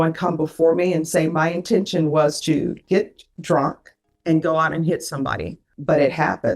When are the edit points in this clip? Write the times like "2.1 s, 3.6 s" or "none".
5.6 s